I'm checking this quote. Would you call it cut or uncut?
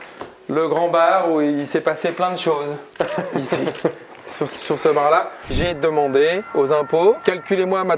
cut